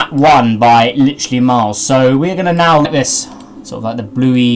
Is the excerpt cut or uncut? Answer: uncut